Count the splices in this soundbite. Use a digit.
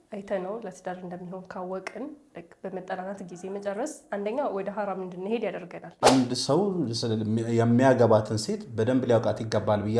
1